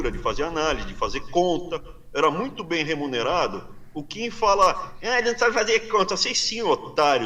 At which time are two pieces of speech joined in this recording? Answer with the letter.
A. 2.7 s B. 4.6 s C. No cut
C